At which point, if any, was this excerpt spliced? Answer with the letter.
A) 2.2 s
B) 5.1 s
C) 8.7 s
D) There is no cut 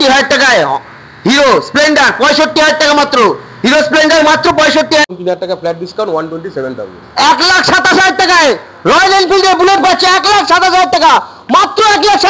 B